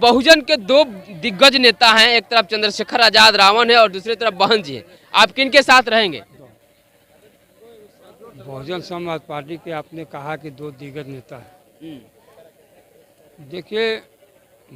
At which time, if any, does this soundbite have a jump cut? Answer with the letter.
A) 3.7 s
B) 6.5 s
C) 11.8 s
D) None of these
B